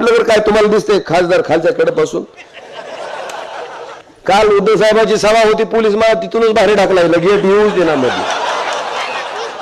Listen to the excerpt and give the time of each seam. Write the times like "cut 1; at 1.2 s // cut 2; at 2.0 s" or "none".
cut 1; at 4.1 s